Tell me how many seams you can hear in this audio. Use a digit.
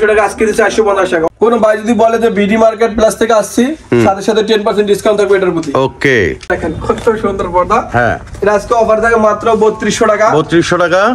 2